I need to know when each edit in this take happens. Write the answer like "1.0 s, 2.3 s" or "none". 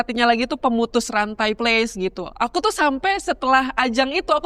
1.6 s